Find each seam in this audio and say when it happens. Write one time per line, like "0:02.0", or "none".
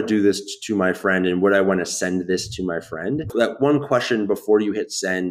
0:03.3